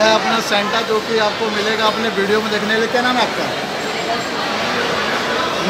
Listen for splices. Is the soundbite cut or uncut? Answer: uncut